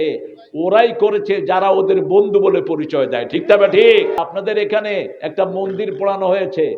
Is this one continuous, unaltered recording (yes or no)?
no